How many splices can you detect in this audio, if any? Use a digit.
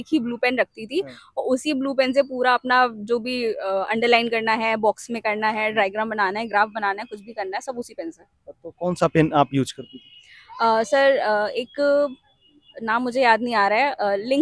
0